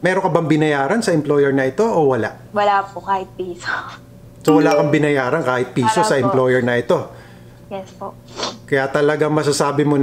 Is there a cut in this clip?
yes; 1 cut; at 2.4 s

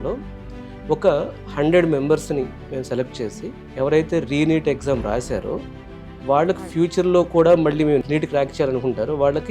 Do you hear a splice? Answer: yes; 1 cut; at 3.6 s

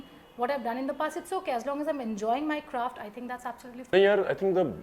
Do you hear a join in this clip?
yes; 1 cut; at 3.9 s

